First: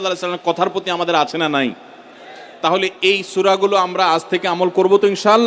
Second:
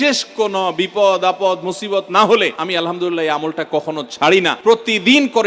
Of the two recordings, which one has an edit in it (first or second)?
second